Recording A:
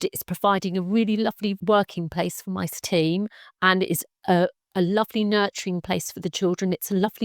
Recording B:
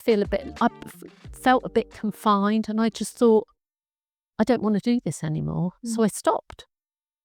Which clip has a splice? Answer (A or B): A